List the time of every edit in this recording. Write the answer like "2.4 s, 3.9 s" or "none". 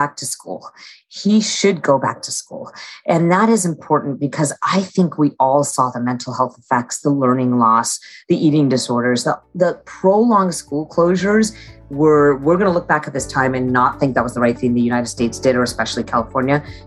none